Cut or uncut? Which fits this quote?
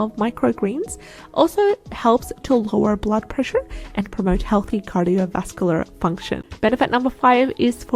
cut